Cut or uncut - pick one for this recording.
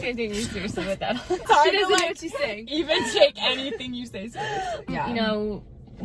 cut